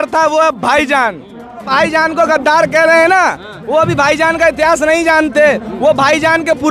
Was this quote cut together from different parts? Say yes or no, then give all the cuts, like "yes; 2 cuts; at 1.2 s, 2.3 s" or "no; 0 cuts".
yes; 1 cut; at 1.7 s